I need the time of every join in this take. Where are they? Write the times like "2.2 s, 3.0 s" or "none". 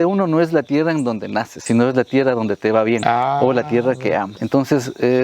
1.5 s, 3.0 s, 4.3 s